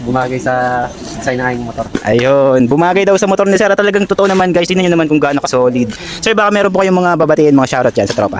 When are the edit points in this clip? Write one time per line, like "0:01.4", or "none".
none